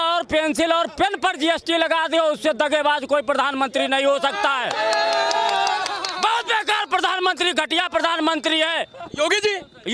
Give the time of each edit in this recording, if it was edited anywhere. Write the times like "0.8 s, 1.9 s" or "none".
none